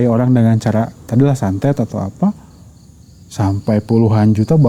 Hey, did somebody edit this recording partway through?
no; 0 cuts

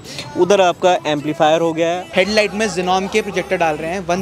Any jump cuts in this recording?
yes; 1 cut; at 2.0 s

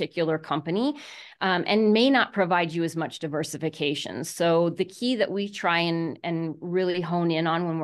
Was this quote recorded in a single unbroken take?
yes; 0 cuts

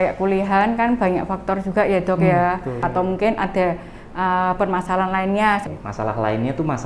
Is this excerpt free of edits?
no; 2 cuts; at 2.8 s, 5.7 s

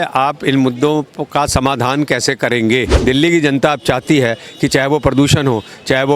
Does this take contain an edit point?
yes; 1 cut; at 2.9 s

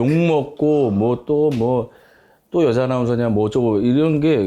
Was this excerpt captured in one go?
yes; 0 cuts

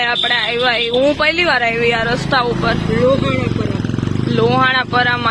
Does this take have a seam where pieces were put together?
no; 0 cuts

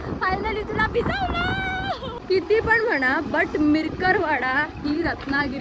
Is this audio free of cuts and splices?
no; 1 cut; at 2.1 s

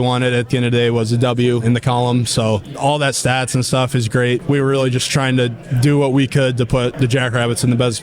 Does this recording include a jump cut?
yes; 4 cuts; at 1.6 s, 2.7 s, 4.4 s, 6.9 s

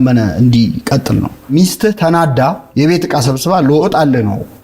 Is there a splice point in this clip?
yes; 2 cuts; at 1.5 s, 2.6 s

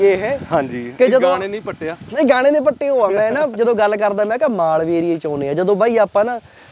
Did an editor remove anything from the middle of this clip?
no; 0 cuts

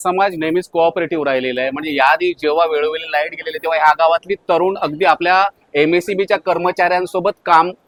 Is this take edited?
no; 0 cuts

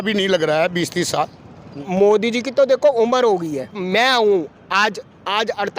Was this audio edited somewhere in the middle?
yes; 2 cuts; at 1.7 s, 3.8 s

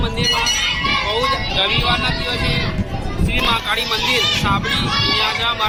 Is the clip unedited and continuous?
yes; 0 cuts

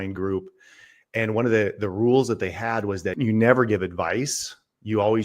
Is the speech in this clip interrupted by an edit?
yes; 1 cut; at 3.1 s

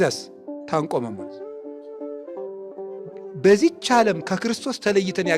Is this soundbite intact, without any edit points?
yes; 0 cuts

